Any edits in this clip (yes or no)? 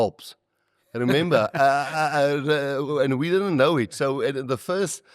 no